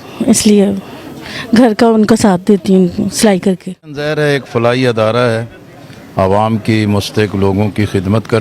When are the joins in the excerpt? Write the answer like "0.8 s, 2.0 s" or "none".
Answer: 4.1 s